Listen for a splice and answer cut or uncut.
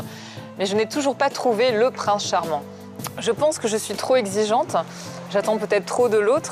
uncut